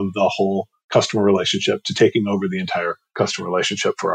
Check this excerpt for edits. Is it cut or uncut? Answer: cut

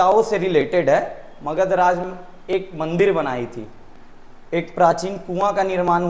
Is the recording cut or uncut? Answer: uncut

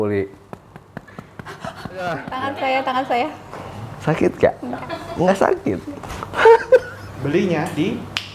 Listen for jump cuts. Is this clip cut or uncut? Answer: cut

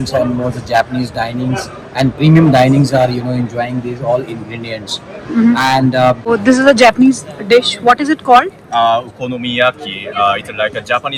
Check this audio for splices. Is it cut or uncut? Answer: cut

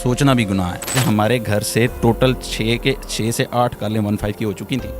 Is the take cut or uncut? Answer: cut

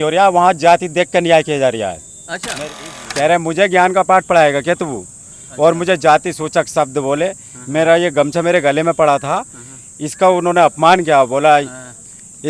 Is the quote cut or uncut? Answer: cut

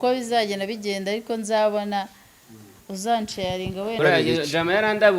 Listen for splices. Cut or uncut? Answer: cut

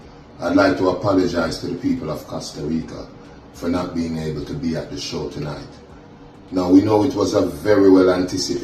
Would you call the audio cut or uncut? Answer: uncut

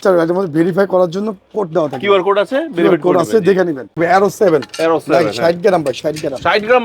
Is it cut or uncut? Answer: cut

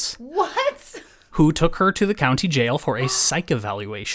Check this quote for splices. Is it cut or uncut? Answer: uncut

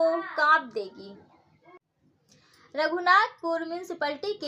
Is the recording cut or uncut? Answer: cut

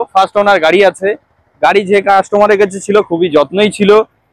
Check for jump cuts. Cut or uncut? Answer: uncut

